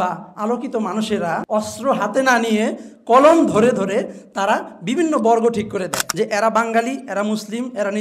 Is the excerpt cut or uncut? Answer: cut